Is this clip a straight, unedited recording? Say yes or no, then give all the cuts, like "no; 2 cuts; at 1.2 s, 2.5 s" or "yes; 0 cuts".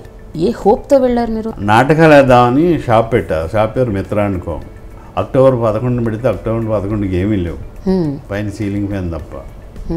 no; 1 cut; at 1.5 s